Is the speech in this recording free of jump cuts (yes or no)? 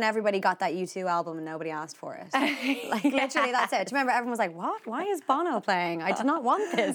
yes